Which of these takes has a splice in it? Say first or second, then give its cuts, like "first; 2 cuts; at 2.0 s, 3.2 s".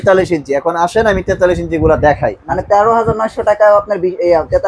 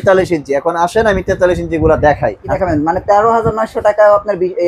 first; 1 cut; at 2.5 s